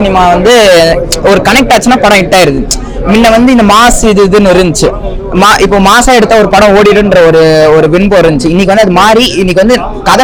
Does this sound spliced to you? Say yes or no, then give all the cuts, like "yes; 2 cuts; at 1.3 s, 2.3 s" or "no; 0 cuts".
no; 0 cuts